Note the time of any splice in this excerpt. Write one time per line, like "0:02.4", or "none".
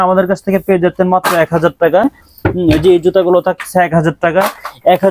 none

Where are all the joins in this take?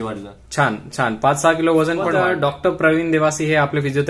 0:02.1

